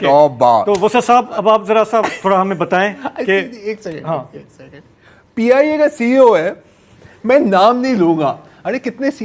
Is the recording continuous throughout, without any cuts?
yes; 0 cuts

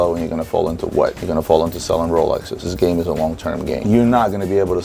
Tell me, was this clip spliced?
yes; 3 cuts; at 1.2 s, 2.7 s, 3.9 s

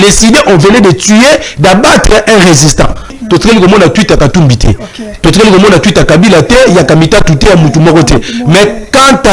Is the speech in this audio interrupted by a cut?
yes; 1 cut; at 3.2 s

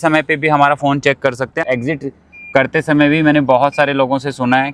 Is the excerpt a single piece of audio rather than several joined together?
no; 1 cut; at 1.6 s

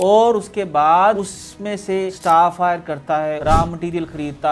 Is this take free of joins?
no; 2 cuts; at 2.1 s, 3.4 s

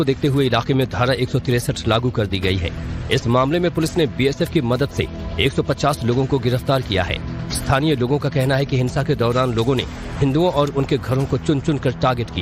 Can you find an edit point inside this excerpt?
no; 0 cuts

